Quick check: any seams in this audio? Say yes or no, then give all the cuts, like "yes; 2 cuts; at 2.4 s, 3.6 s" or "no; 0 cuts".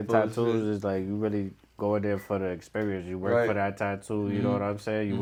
no; 0 cuts